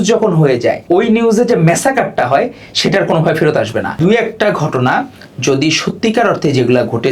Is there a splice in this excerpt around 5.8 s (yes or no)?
no